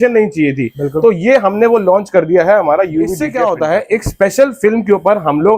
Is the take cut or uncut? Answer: cut